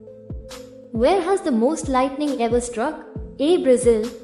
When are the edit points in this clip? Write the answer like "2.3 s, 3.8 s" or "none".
0.9 s